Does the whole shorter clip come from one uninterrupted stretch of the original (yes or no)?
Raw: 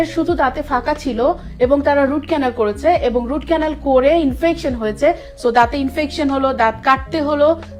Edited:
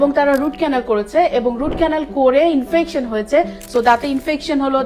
yes